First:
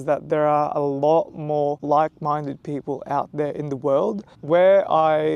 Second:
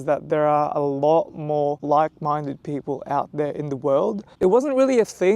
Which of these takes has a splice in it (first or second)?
second